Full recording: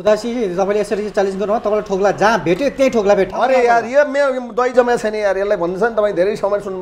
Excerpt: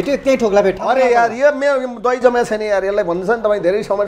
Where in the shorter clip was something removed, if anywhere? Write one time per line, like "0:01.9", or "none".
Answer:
none